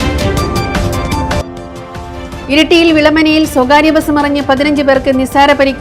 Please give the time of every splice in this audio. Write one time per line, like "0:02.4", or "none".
0:01.4